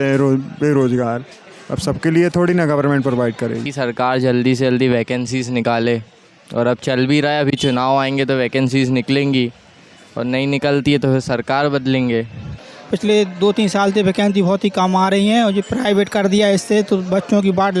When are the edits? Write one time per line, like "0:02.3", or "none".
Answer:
0:03.7
0:12.6